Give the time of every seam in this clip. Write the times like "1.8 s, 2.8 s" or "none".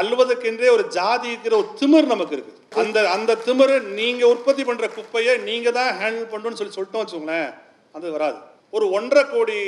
2.7 s, 8.5 s